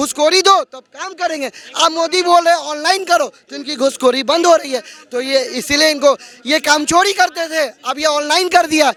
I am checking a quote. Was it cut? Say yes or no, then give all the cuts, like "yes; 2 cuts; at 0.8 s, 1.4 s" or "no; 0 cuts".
no; 0 cuts